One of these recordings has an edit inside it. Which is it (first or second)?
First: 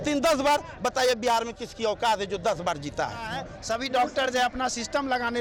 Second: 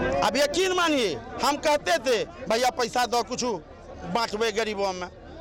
first